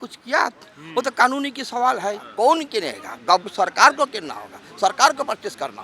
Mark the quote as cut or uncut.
cut